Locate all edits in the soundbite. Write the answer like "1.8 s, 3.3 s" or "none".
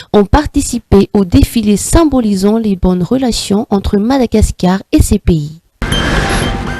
5.8 s